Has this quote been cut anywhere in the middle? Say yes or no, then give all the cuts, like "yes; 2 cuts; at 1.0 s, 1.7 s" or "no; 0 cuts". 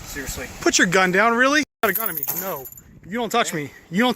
yes; 1 cut; at 1.7 s